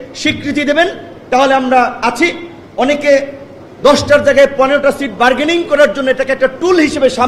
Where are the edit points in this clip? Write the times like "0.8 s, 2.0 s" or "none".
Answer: none